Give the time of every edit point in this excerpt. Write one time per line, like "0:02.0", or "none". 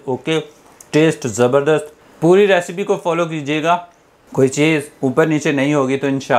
none

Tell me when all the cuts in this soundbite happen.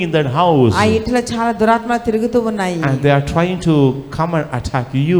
none

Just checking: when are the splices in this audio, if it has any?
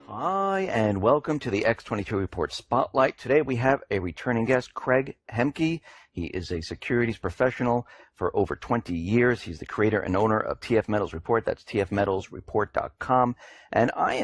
none

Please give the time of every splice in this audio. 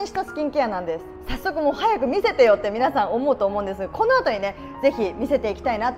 none

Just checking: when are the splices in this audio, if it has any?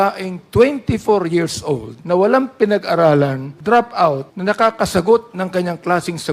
0:01.9
0:03.5
0:04.3

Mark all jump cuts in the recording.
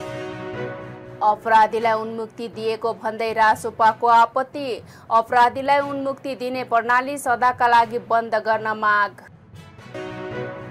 none

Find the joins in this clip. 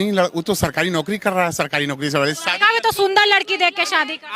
none

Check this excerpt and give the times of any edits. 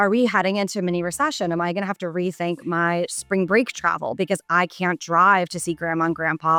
none

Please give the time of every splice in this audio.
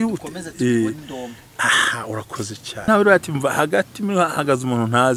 0:02.9

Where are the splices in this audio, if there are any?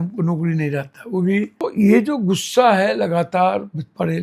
0:01.6

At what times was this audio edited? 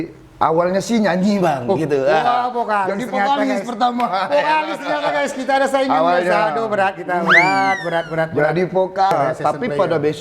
0:09.1

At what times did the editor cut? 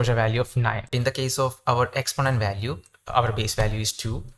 0:01.0
0:02.9

